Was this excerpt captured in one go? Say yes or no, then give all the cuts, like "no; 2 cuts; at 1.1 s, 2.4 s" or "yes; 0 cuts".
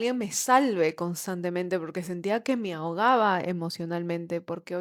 yes; 0 cuts